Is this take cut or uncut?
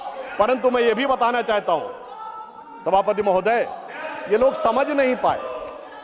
uncut